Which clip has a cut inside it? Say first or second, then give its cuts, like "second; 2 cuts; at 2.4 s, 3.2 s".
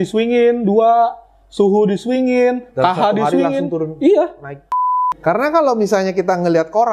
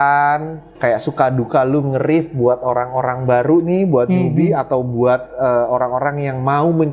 first; 1 cut; at 4.8 s